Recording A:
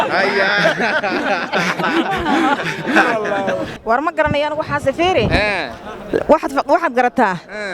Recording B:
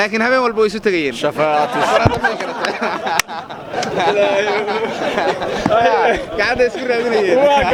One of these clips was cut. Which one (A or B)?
A